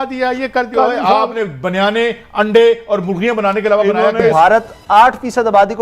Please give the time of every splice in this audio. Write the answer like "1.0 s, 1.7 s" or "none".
4.3 s